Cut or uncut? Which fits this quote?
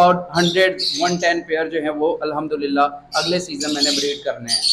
uncut